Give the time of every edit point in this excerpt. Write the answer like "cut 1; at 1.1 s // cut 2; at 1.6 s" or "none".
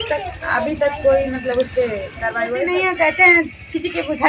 cut 1; at 2.6 s

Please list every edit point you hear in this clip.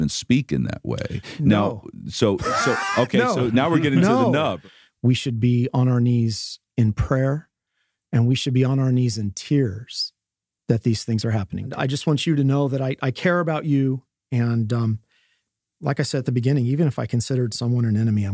cut 1; at 4.6 s // cut 2; at 11.7 s

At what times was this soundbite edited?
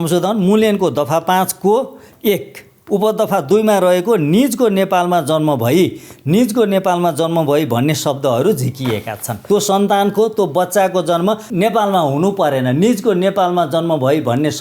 cut 1; at 9.4 s // cut 2; at 11.5 s

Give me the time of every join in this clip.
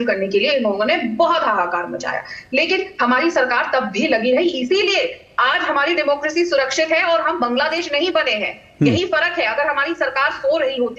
none

